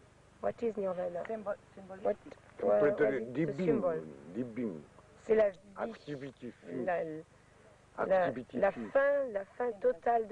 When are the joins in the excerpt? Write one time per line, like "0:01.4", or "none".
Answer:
0:08.5